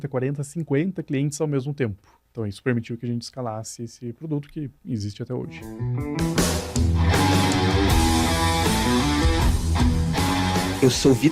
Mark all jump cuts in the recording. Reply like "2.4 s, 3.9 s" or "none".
2.2 s, 5.8 s